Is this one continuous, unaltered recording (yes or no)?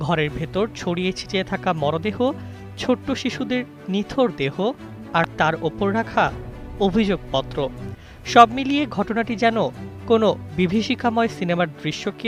yes